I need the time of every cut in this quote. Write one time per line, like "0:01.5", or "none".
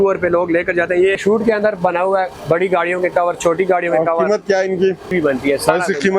0:01.2
0:05.1